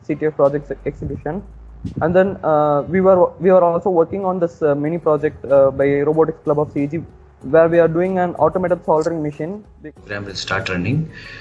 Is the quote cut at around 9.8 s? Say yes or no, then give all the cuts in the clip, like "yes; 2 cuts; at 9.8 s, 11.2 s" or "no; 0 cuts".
yes; 1 cut; at 9.8 s